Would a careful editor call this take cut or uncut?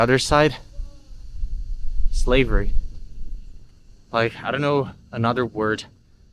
uncut